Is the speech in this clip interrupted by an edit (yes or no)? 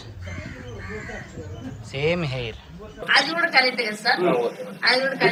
no